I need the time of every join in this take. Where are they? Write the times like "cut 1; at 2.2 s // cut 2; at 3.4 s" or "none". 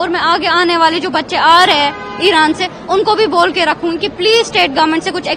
none